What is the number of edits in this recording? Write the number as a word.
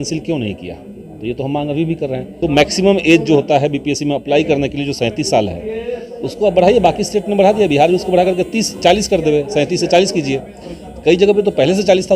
one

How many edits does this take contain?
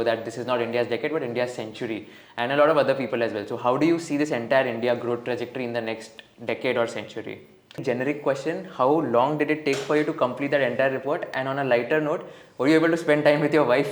one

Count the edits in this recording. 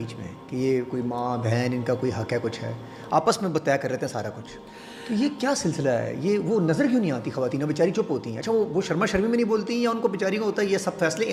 zero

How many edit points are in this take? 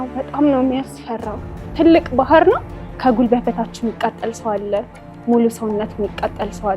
one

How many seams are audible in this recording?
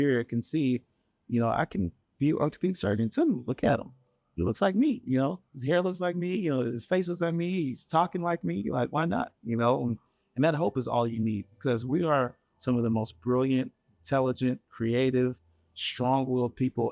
zero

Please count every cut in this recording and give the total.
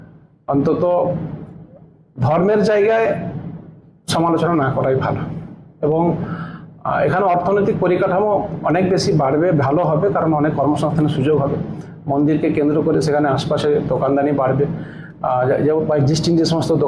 zero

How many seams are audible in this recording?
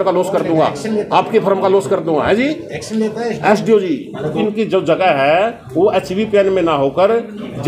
one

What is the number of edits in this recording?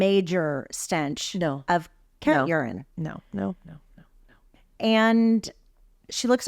one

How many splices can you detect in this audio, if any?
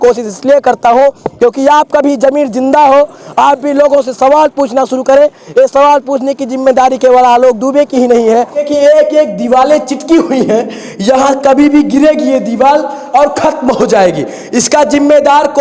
one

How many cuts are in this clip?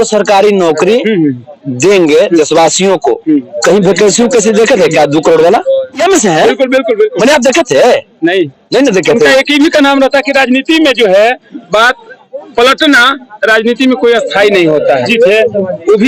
zero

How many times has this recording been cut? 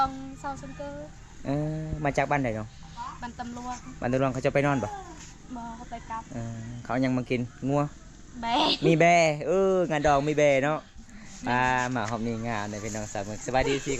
zero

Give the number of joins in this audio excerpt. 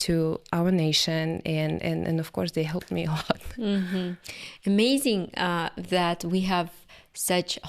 zero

